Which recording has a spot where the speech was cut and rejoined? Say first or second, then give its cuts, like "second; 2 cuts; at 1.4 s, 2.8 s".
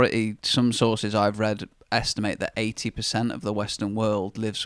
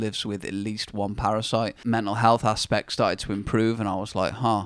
second; 1 cut; at 1.8 s